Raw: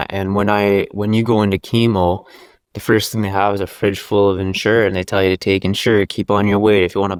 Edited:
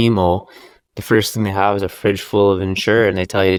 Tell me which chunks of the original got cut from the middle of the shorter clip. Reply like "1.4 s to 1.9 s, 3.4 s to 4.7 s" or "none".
none